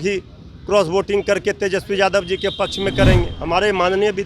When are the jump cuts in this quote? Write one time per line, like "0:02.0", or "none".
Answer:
0:03.4